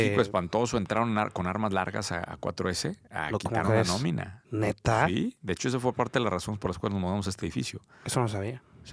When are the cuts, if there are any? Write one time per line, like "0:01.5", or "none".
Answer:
none